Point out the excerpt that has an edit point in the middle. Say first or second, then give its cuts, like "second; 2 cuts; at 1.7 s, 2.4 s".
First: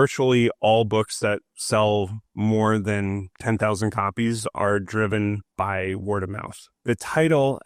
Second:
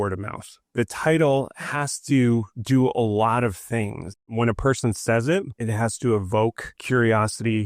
second; 4 cuts; at 2.5 s, 4.3 s, 5.5 s, 6.7 s